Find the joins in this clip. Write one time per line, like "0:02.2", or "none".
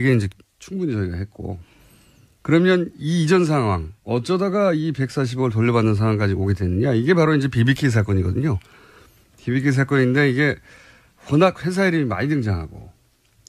0:09.1